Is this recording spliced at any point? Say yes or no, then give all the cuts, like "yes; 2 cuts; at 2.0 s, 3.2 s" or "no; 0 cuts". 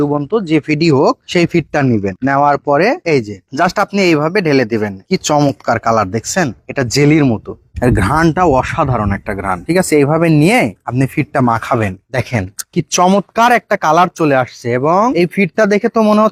no; 0 cuts